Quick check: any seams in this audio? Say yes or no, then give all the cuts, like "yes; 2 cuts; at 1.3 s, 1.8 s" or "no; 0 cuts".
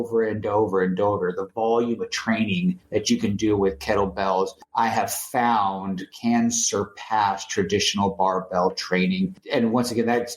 yes; 3 cuts; at 2.8 s, 4.6 s, 9.4 s